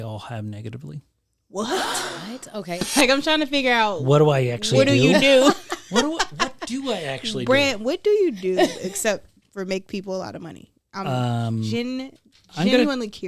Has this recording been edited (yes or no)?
yes